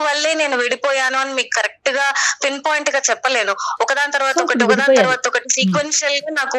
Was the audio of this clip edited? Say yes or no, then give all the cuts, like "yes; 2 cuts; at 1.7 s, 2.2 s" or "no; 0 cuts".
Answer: no; 0 cuts